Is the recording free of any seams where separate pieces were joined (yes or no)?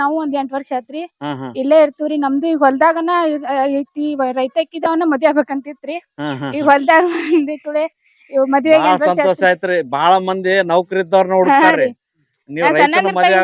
yes